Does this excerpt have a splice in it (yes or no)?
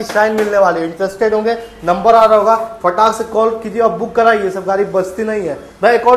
no